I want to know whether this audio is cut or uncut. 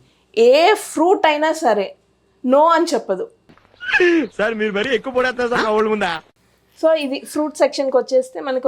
uncut